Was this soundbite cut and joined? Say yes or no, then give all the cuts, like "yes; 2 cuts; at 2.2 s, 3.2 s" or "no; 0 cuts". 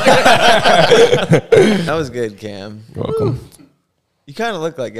yes; 1 cut; at 1.9 s